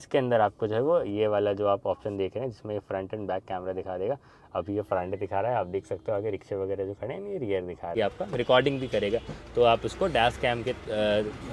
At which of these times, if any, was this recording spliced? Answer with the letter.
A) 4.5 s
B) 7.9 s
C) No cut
B